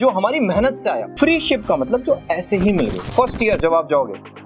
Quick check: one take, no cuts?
no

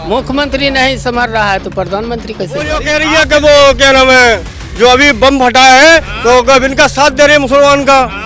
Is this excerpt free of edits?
no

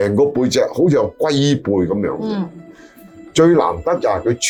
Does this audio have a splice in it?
no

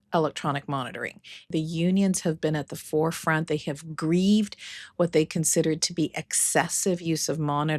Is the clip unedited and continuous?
no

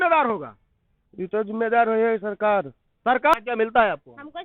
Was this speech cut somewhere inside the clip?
yes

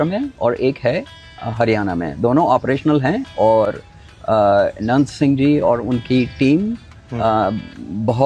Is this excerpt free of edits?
yes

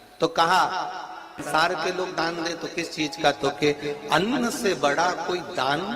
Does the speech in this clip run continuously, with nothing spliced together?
no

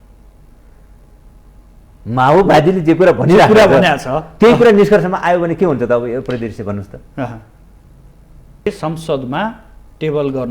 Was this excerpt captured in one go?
no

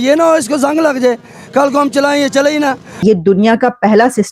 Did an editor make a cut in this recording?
yes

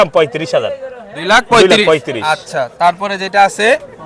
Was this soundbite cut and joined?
no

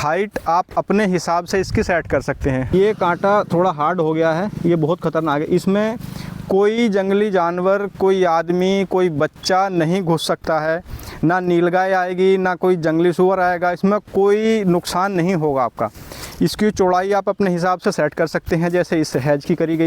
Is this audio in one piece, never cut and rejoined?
no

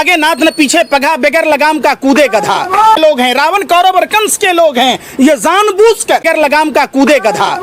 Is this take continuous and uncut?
no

